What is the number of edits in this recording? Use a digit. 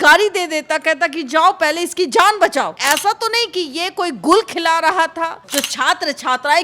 2